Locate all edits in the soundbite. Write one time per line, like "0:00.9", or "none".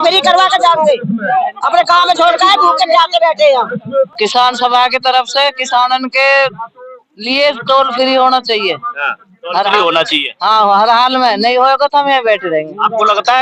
none